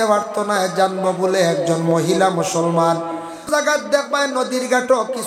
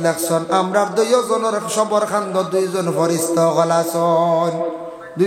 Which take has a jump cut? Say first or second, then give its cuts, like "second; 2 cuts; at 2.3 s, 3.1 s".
first; 1 cut; at 3.5 s